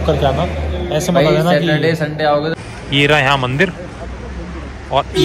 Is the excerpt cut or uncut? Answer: cut